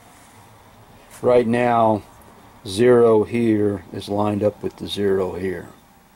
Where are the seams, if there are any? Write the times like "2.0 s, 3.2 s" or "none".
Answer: none